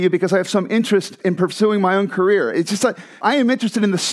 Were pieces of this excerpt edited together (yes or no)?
yes